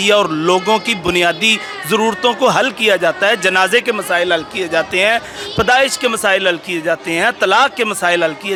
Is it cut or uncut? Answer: uncut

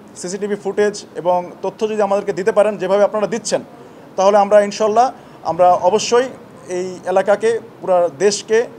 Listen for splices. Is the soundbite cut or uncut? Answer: uncut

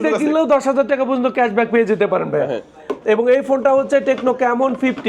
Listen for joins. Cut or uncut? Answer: uncut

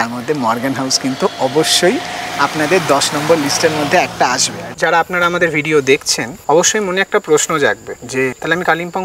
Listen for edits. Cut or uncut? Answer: cut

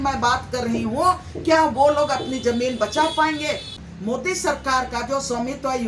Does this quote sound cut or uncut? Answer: cut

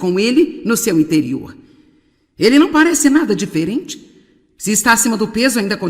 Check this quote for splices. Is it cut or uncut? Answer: cut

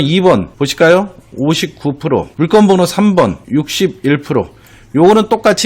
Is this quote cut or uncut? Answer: uncut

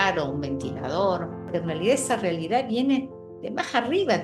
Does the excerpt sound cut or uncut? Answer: cut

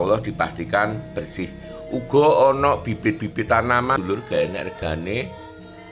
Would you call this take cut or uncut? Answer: cut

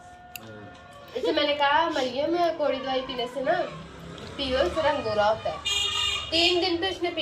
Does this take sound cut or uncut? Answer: uncut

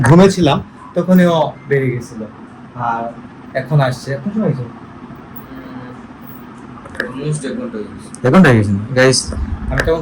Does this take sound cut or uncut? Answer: uncut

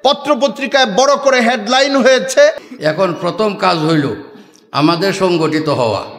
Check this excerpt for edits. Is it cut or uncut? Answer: cut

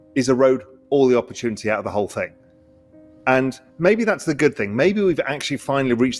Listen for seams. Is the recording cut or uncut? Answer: uncut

